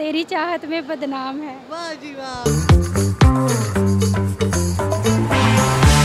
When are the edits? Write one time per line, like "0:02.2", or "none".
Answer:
0:02.3